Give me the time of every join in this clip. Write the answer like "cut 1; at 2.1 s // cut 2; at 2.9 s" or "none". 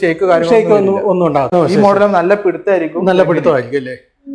cut 1; at 1.5 s